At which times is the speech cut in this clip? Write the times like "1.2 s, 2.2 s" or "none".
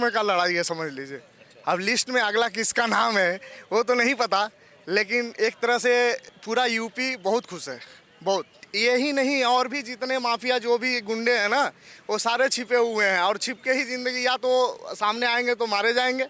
6.3 s, 8.6 s